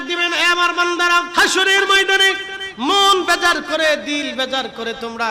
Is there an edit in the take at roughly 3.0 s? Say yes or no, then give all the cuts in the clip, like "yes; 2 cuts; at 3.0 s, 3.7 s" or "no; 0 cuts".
no; 1 cut; at 1.3 s